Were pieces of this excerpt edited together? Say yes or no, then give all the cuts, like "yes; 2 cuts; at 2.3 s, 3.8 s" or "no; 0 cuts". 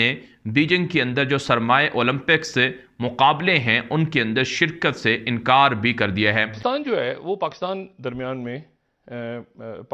yes; 1 cut; at 6.6 s